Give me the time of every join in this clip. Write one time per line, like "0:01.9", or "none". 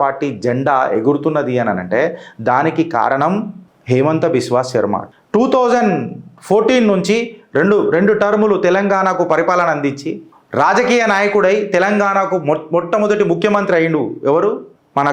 0:05.0